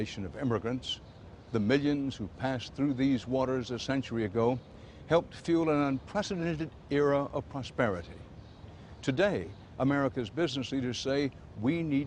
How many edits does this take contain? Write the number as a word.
zero